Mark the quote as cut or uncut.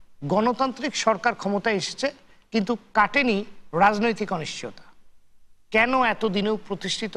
uncut